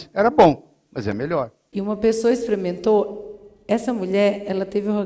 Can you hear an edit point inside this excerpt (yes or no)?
yes